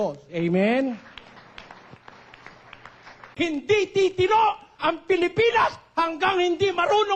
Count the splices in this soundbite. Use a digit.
1